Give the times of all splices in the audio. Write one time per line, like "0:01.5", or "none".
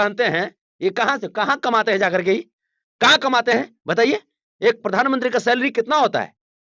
none